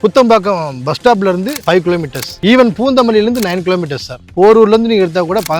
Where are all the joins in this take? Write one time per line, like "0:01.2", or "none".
none